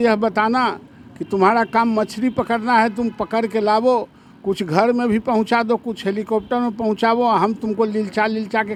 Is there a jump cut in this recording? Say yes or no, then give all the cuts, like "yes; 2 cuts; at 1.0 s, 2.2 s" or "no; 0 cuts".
no; 0 cuts